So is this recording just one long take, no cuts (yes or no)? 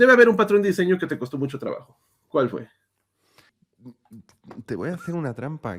yes